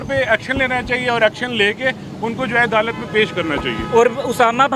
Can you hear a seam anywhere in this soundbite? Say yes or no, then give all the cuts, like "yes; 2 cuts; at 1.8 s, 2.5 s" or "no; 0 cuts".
no; 0 cuts